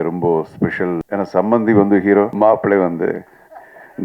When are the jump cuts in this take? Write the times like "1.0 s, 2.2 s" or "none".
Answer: 1.0 s, 2.3 s

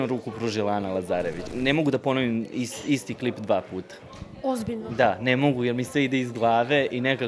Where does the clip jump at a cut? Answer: 1.5 s

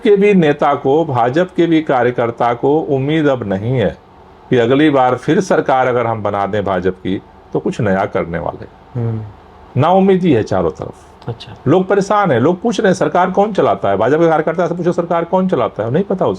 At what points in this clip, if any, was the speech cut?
none

